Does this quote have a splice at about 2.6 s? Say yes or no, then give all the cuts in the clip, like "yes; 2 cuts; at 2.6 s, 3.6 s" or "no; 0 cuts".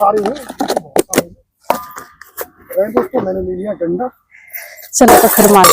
yes; 1 cut; at 2.6 s